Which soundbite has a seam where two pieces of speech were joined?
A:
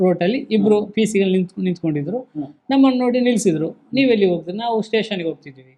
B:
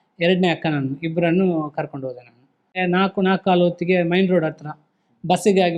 B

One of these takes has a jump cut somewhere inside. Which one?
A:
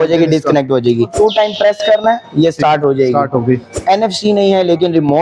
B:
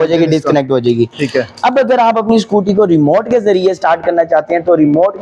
A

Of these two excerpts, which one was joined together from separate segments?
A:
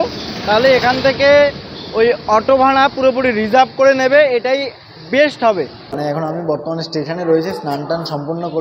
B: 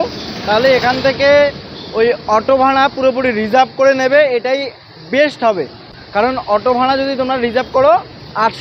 A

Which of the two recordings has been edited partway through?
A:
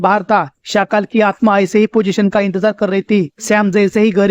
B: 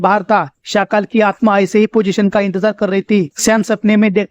B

